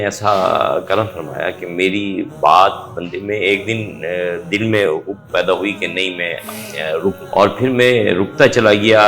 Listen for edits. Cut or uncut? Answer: cut